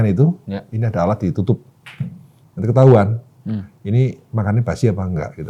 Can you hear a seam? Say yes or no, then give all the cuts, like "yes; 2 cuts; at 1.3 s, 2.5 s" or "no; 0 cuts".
no; 0 cuts